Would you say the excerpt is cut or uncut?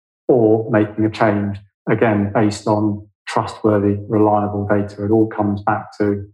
uncut